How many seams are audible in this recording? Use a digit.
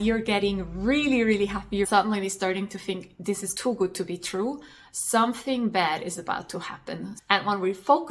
2